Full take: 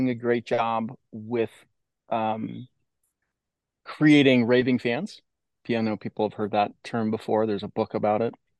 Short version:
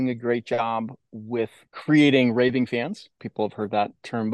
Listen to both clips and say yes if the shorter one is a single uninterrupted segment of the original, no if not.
no